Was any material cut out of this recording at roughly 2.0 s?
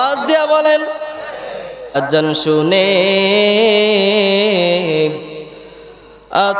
yes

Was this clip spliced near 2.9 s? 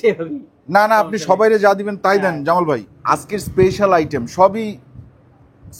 yes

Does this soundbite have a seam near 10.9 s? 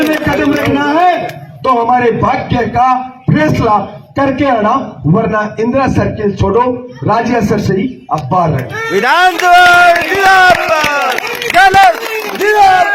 no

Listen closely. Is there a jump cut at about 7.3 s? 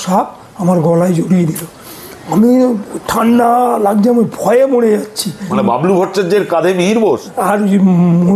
yes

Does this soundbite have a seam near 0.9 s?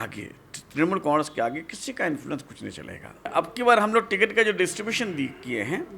no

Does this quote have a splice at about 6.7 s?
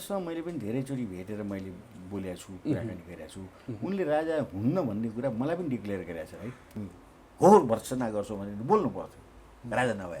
yes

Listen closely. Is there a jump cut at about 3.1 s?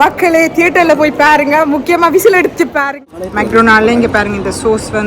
yes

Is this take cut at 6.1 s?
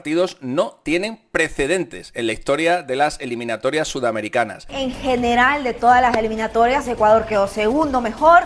no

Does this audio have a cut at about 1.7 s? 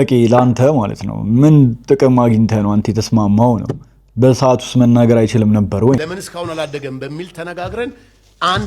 no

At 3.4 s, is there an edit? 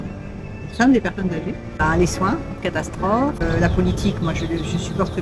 yes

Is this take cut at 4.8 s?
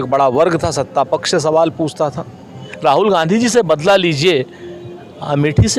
no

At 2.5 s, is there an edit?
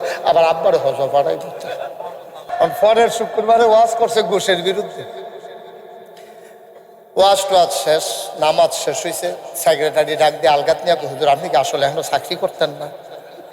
yes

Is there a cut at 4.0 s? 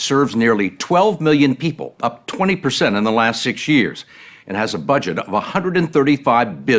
yes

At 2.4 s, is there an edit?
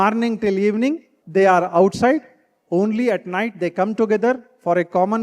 no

